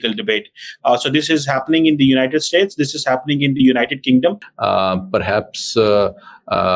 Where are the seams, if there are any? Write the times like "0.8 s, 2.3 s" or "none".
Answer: 4.5 s